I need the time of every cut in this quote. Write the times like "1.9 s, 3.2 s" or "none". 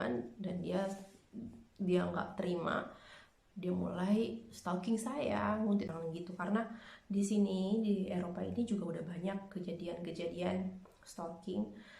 5.9 s